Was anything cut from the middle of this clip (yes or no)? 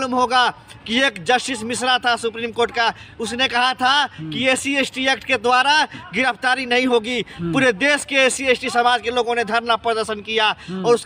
no